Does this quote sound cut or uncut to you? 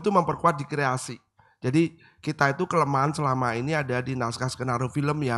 uncut